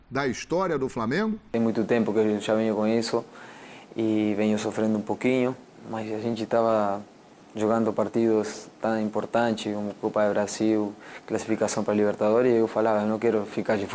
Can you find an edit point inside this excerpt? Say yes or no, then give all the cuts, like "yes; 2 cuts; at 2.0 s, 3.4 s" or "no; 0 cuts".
yes; 1 cut; at 1.4 s